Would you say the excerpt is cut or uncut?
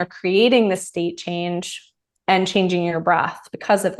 uncut